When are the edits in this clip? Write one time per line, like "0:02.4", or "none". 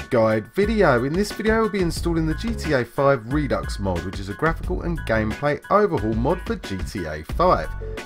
none

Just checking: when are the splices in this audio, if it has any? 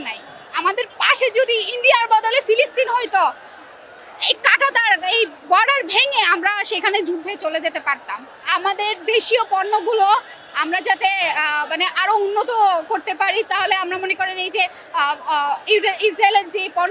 none

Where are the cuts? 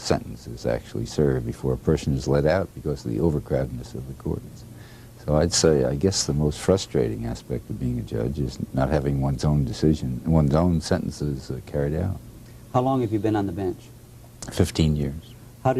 0:08.7

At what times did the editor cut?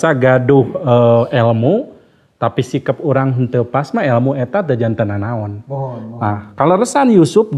none

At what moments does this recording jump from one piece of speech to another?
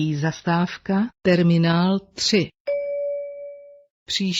0:01.1
0:02.6

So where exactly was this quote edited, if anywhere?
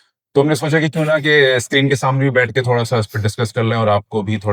none

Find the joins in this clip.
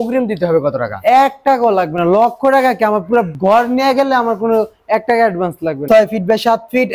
0:03.3
0:05.8

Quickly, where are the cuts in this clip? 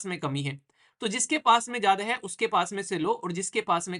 none

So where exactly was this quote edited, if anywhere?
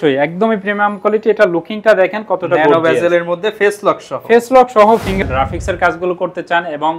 0:05.2

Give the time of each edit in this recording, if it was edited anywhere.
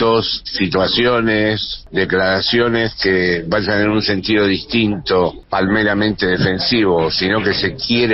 0:01.7
0:05.4

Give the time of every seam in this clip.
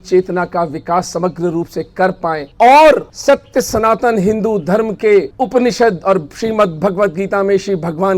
0:02.5
0:03.1
0:05.3

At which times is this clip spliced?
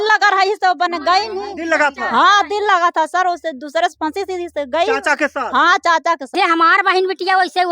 0:06.3

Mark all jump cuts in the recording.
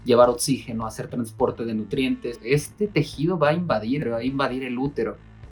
0:02.3
0:04.0

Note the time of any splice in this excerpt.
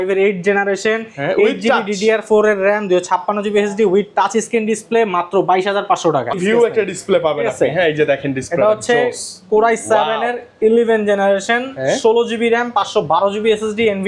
0:06.4

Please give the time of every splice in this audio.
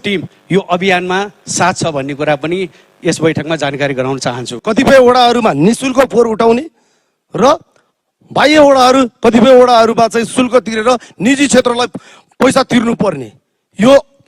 0:04.6

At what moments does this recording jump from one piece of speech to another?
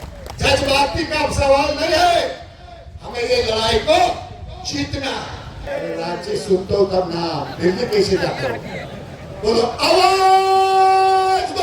0:05.7

